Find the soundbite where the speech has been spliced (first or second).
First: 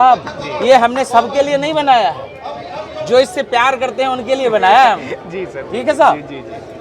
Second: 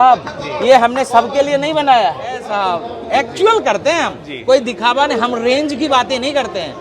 second